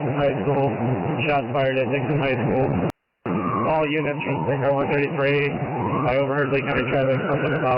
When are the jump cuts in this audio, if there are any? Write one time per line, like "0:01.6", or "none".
none